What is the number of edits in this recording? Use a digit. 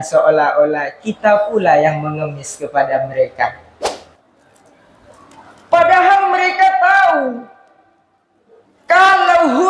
1